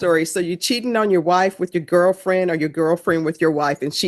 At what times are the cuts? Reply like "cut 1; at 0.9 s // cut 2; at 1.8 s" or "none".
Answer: none